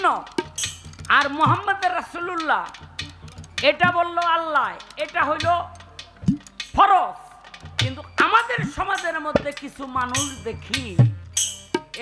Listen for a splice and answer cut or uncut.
uncut